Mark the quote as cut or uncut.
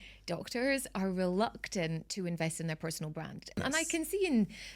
cut